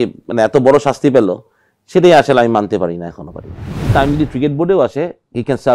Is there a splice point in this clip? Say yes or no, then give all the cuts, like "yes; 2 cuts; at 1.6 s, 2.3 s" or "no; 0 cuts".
yes; 1 cut; at 3.9 s